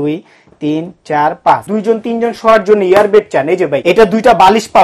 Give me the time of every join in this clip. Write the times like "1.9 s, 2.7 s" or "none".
1.7 s, 3.8 s